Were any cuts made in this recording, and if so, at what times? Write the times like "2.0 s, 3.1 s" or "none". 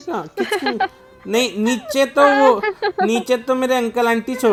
none